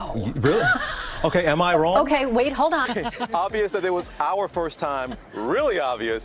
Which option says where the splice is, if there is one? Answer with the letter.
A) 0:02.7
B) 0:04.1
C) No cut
A